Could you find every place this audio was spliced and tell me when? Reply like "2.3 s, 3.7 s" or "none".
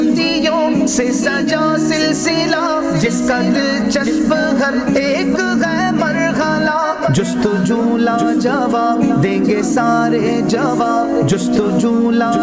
none